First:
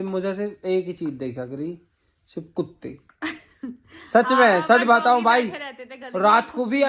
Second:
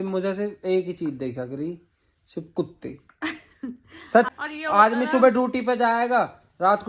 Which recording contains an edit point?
second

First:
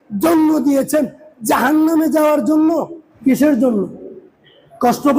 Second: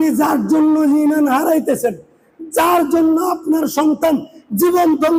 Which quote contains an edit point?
first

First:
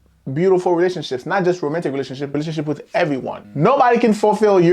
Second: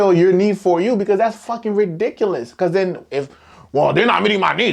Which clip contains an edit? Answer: first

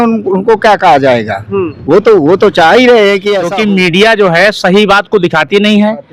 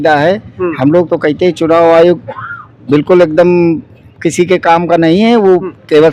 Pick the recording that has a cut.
first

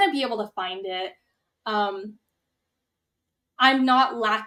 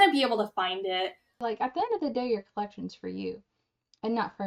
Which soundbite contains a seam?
second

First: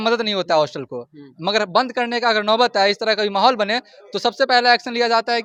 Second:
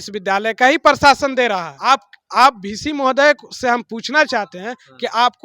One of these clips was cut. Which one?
second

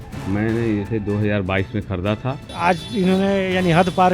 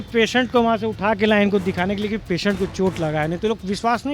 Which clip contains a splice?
first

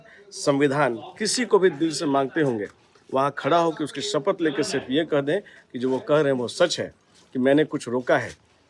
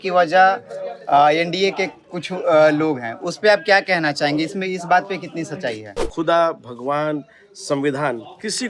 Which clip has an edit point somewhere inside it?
second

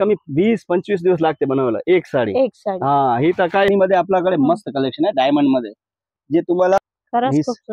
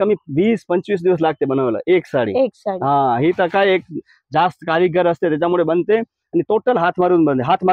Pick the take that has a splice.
first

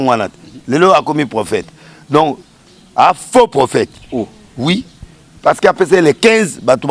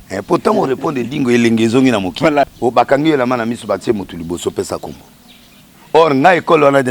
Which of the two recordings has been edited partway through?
second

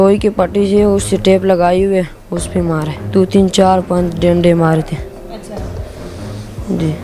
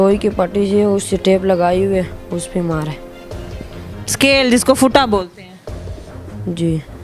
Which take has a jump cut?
first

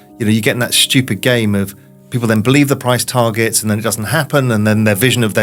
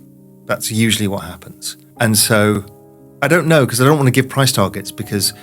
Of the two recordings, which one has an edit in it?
second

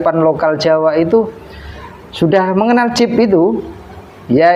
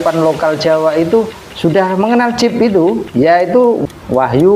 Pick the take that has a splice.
second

